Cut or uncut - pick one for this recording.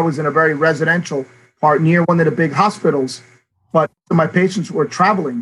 cut